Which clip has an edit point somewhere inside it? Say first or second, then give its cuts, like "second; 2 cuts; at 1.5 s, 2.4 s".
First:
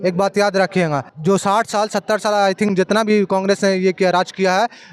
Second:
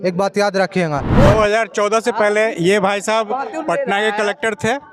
second; 1 cut; at 1.1 s